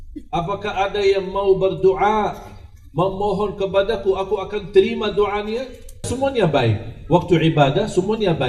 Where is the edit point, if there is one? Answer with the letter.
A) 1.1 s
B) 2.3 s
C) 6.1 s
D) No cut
C